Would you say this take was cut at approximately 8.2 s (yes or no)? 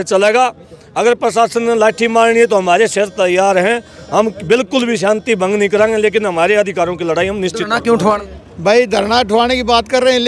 yes